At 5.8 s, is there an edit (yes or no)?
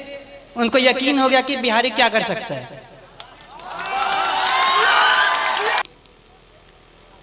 yes